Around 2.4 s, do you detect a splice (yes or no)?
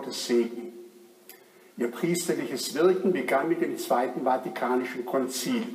yes